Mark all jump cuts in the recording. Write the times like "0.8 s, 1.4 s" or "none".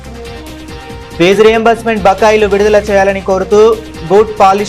1.1 s